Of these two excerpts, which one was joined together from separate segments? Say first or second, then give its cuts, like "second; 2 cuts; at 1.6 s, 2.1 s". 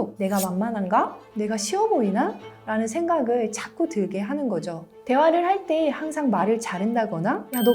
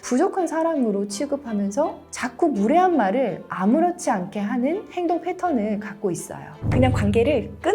second; 1 cut; at 6.5 s